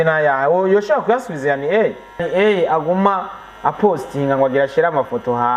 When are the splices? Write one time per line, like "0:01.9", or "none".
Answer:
0:02.2